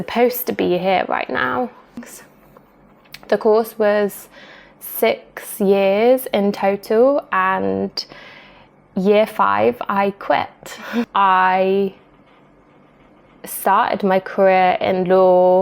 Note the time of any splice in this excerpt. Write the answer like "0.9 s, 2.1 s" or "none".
2.1 s, 11.1 s